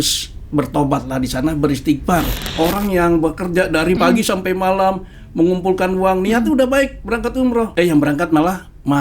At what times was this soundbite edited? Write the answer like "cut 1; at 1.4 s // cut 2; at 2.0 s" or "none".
cut 1; at 2.4 s // cut 2; at 4.0 s // cut 3; at 7.7 s